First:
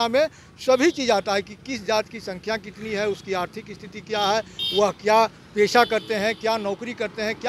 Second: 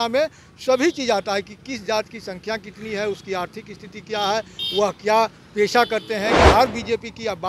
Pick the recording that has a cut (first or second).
second